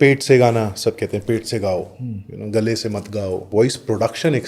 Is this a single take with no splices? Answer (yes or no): no